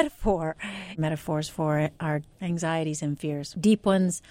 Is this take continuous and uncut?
no; 3 cuts; at 1.0 s, 2.3 s, 3.5 s

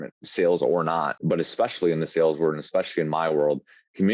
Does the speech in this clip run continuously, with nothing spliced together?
no; 1 cut; at 1.2 s

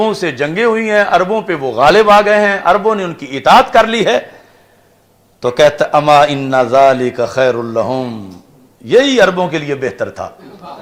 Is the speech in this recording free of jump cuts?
yes; 0 cuts

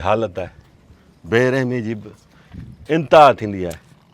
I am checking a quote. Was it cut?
no; 0 cuts

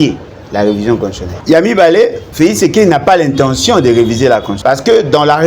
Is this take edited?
yes; 3 cuts; at 1.3 s, 2.2 s, 4.5 s

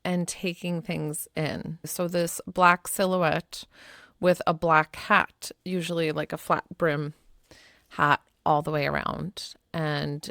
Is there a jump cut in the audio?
yes; 1 cut; at 1.9 s

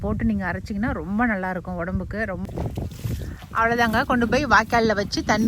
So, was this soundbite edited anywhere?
yes; 1 cut; at 2.4 s

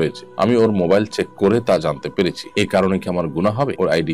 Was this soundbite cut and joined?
no; 0 cuts

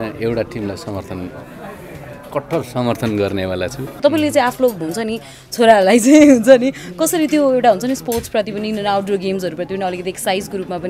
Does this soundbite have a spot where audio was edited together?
yes; 1 cut; at 3.9 s

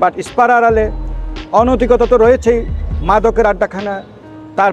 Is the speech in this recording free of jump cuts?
yes; 0 cuts

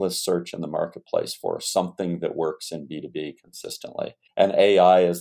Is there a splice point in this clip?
yes; 1 cut; at 4.2 s

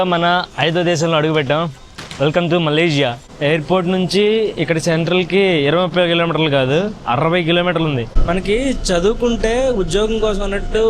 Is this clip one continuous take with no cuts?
no; 2 cuts; at 3.3 s, 8.1 s

